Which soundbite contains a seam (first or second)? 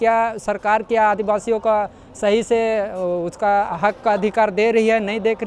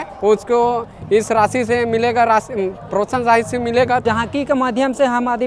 second